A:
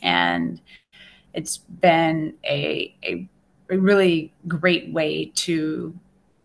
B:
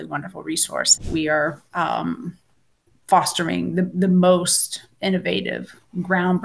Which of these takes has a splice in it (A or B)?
B